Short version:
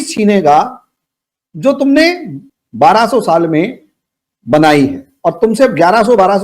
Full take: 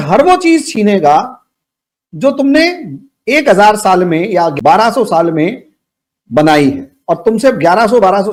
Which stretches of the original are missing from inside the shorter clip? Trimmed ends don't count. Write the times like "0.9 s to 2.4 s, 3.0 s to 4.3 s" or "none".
3.3 s to 4.5 s